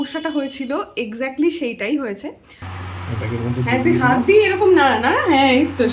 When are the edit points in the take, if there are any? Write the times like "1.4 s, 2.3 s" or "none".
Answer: 2.7 s